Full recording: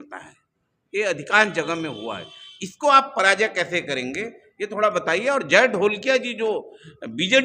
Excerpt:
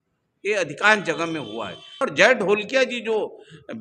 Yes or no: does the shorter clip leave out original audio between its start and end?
yes